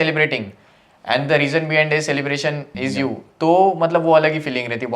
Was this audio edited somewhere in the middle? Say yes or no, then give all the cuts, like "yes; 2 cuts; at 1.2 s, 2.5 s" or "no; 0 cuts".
yes; 1 cut; at 2.7 s